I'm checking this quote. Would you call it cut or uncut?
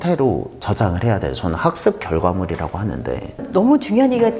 cut